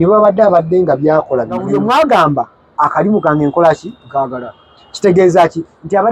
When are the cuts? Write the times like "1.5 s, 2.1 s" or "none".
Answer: 1.7 s

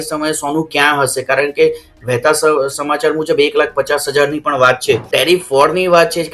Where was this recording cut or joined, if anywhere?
5.1 s

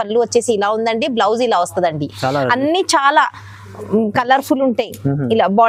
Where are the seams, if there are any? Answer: none

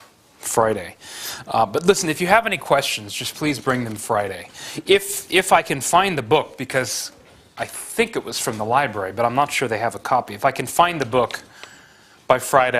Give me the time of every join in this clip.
10.4 s

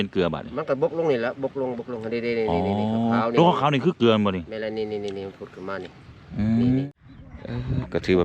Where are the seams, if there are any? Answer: 6.9 s

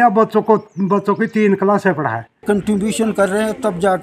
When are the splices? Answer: 2.4 s

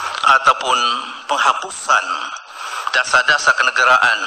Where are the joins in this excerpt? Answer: none

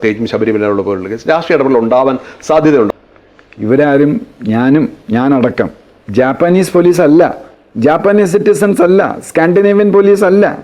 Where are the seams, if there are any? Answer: 2.9 s

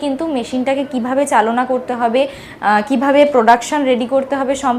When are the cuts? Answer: none

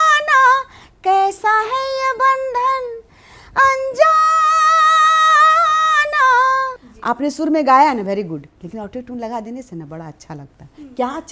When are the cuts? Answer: 6.8 s

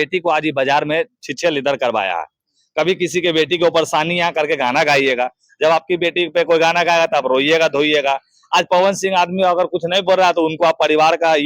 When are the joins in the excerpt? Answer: none

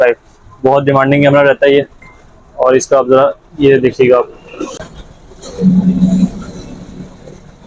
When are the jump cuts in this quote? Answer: 4.8 s

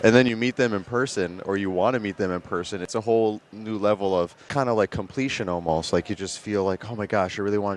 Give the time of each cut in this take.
2.9 s, 4.5 s

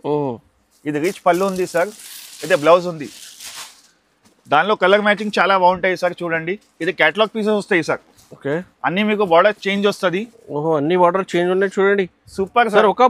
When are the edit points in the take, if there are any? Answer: none

